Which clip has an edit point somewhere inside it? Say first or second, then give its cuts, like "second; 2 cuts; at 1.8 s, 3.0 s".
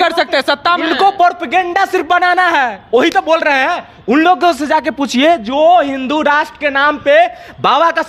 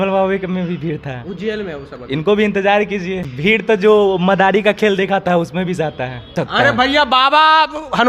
second; 2 cuts; at 3.3 s, 6.4 s